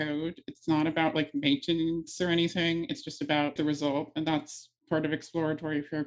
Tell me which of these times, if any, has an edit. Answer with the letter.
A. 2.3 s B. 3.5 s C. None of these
B